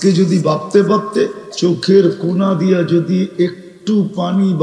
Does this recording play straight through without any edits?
no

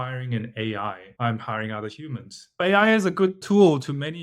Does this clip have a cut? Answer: yes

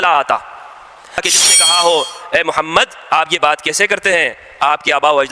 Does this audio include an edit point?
yes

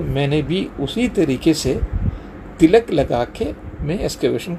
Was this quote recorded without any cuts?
yes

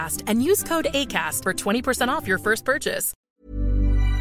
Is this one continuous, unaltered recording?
no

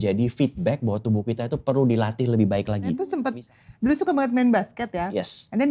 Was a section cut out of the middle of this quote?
yes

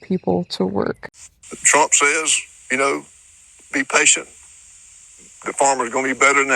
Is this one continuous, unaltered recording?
no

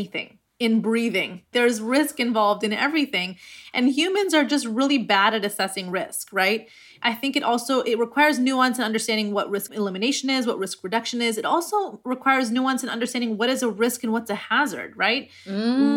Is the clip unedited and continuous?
no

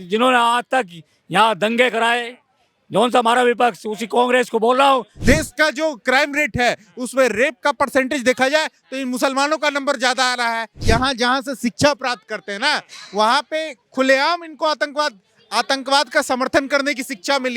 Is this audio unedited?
no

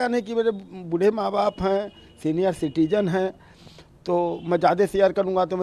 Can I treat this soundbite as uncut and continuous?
yes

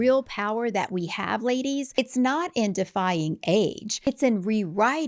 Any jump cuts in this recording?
yes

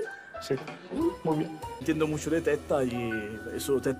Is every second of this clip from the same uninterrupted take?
yes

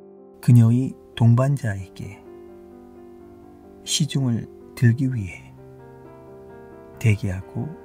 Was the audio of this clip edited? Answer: no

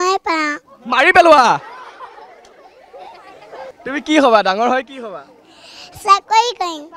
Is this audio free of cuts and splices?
no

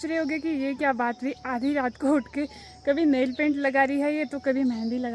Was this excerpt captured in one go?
yes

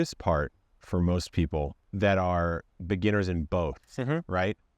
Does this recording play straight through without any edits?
no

